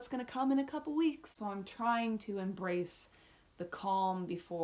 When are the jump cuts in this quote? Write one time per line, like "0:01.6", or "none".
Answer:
0:01.3